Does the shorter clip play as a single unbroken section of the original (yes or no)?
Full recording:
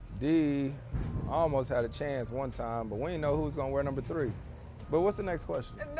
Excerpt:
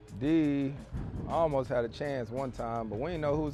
yes